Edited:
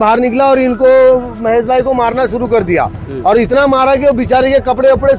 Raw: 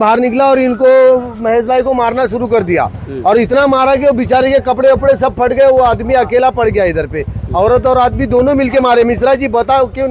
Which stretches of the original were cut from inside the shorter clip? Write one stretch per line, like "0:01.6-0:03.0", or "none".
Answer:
none